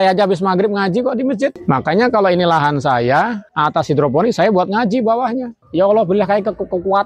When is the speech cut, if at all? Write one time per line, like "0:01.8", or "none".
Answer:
0:05.5